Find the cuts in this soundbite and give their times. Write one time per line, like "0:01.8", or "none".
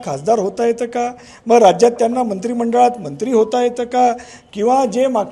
none